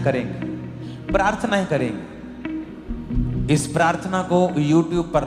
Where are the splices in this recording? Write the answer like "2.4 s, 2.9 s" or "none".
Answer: 0.9 s, 3.1 s